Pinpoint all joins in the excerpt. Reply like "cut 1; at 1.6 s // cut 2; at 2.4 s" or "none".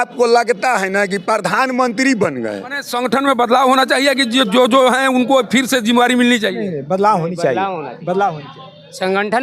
cut 1; at 2.8 s